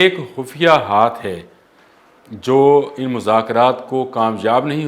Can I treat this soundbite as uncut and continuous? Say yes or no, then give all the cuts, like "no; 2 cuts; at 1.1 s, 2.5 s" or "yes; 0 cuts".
yes; 0 cuts